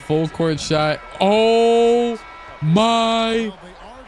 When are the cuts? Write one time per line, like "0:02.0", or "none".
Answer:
none